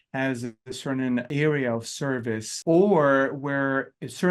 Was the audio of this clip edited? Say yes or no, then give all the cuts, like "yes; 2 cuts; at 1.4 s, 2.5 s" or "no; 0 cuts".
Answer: yes; 2 cuts; at 1.3 s, 2.5 s